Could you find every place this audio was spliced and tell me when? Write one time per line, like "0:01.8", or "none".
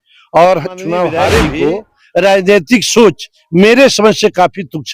0:01.5